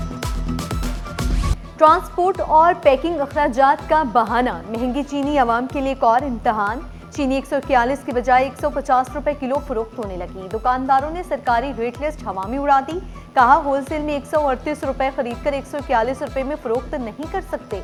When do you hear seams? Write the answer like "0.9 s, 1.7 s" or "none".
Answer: none